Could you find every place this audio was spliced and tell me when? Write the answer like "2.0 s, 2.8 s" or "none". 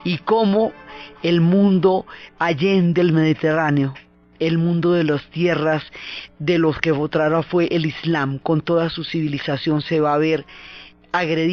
7.9 s